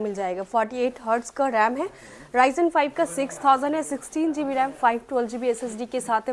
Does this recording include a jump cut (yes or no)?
no